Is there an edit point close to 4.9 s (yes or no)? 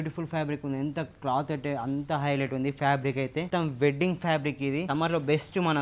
yes